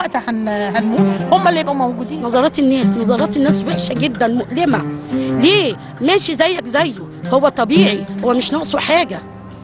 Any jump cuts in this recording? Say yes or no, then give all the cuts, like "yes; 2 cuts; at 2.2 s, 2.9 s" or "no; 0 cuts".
yes; 1 cut; at 2.1 s